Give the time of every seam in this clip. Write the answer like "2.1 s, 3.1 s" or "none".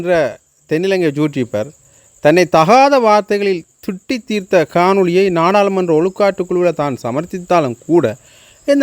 none